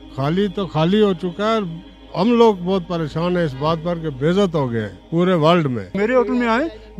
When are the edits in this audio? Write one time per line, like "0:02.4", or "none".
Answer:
0:05.0
0:06.0